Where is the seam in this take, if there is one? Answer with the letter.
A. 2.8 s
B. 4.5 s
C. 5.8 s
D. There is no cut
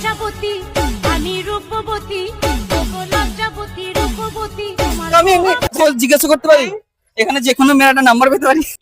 C